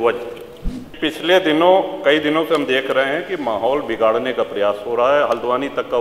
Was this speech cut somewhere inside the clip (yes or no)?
yes